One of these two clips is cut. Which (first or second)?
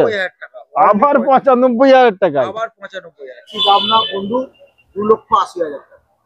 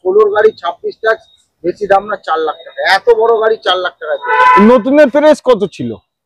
first